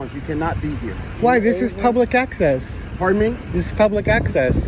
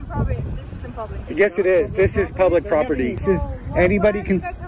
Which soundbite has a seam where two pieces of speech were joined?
second; 1 cut; at 3.2 s

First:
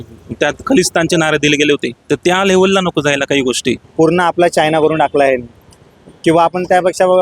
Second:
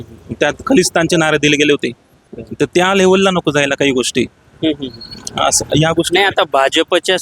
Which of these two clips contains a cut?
first; 2 cuts; at 1.9 s, 3.8 s

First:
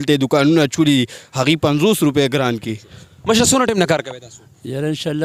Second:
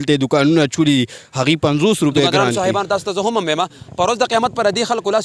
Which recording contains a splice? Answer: second; 1 cut; at 2.4 s

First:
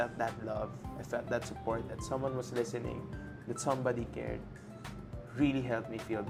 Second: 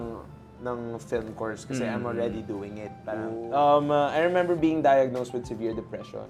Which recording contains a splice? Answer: second; 1 cut; at 3.4 s

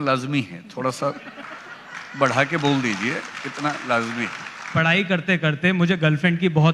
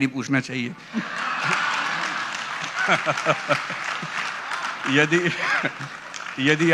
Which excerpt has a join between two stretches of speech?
first; 1 cut; at 4.8 s

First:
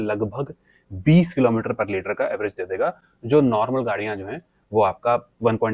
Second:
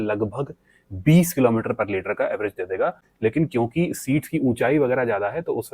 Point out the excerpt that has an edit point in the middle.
second; 1 cut; at 3.0 s

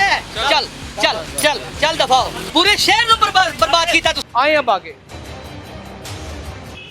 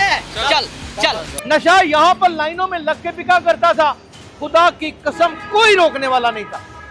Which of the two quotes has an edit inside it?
second; 1 cut; at 1.3 s

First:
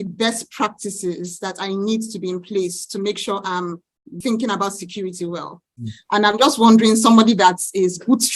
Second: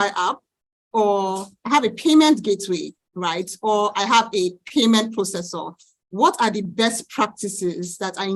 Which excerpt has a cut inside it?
first; 2 cuts; at 4.2 s, 6.0 s

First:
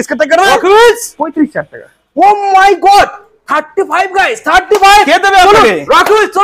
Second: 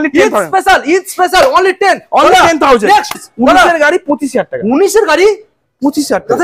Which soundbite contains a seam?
second; 1 cut; at 3.2 s

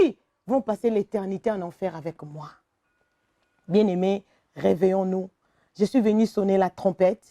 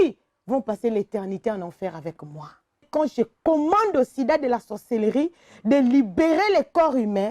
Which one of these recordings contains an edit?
second; 1 cut; at 2.9 s

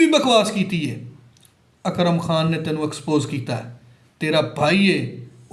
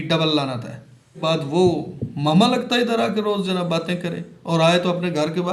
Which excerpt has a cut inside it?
second; 1 cut; at 1.2 s

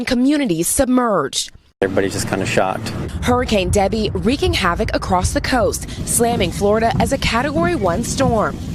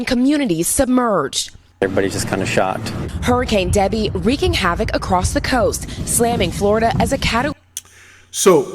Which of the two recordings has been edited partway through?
first; 1 cut; at 7.5 s

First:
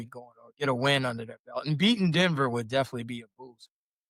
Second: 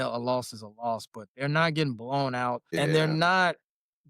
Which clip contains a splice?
second; 1 cut; at 2.7 s

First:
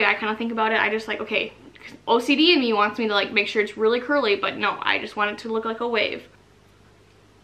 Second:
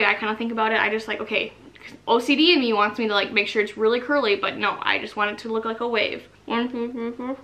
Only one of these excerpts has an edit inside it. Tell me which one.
second; 1 cut; at 6.3 s

